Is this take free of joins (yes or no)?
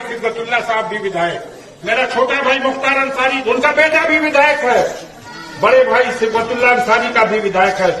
no